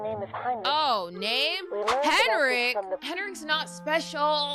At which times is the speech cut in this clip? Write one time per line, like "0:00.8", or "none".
0:03.0